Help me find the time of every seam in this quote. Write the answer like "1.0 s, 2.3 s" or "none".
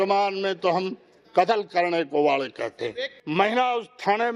3.2 s

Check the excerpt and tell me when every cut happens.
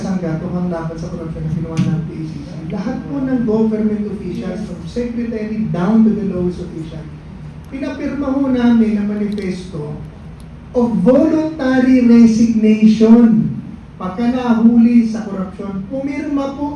none

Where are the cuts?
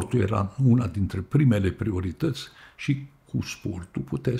none

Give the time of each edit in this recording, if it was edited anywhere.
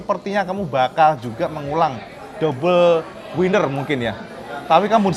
none

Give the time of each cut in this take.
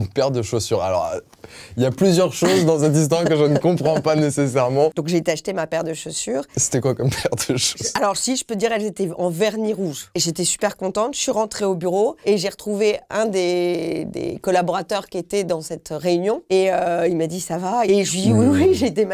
5.0 s, 10.1 s, 12.2 s, 17.9 s

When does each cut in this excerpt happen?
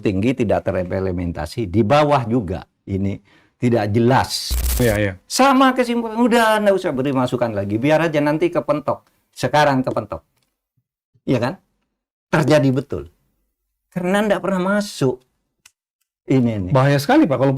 4.8 s

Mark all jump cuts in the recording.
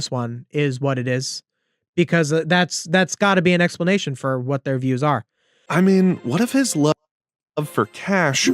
5.3 s

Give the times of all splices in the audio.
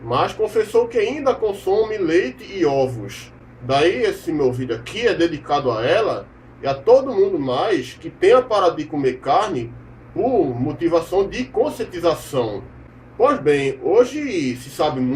6.5 s

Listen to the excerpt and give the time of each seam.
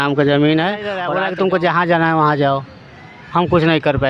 1.0 s

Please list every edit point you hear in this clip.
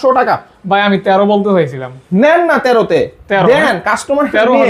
none

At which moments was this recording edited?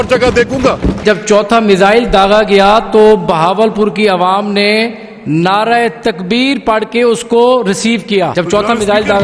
1.0 s, 8.3 s

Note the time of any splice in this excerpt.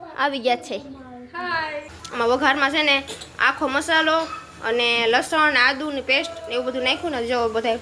1.9 s

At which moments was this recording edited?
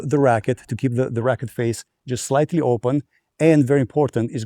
none

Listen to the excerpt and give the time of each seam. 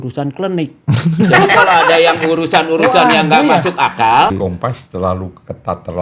4.4 s

